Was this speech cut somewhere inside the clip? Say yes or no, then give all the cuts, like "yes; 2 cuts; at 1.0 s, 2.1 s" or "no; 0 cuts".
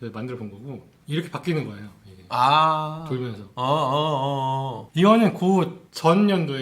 yes; 1 cut; at 4.8 s